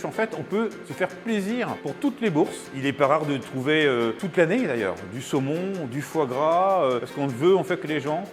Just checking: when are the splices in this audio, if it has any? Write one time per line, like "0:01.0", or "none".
0:00.8
0:01.8
0:02.6
0:04.2
0:07.1